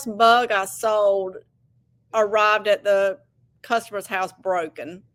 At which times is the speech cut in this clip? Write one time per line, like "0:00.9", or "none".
none

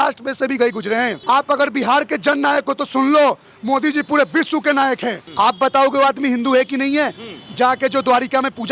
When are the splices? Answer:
0:01.2
0:05.2

